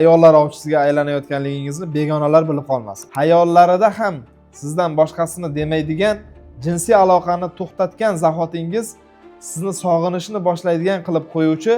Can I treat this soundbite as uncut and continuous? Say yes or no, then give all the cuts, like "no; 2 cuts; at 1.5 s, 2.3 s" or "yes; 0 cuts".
no; 1 cut; at 3.0 s